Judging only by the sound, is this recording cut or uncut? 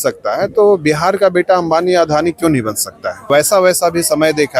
cut